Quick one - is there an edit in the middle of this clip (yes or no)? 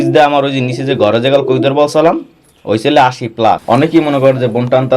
yes